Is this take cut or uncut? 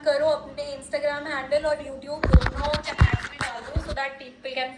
uncut